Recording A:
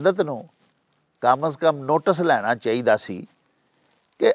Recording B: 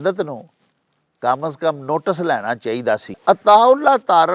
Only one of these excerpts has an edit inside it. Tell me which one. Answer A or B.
B